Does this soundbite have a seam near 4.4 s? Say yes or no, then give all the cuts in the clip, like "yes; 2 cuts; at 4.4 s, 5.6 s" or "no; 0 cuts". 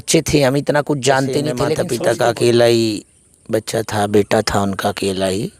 no; 1 cut; at 1.7 s